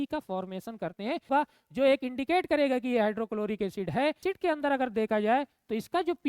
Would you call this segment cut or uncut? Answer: cut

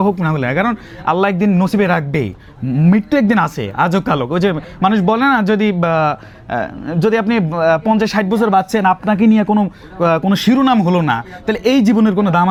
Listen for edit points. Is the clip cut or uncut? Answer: uncut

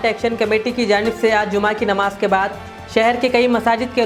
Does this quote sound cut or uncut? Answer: uncut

